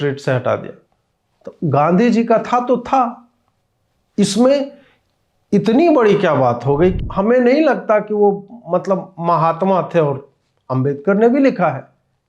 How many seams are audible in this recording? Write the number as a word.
one